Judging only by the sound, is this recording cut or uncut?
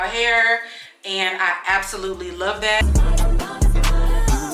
cut